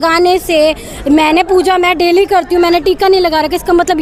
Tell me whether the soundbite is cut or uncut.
uncut